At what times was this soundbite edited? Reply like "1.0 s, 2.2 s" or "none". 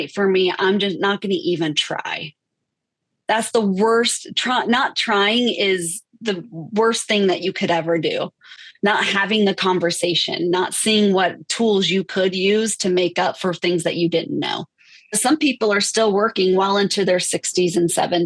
15.2 s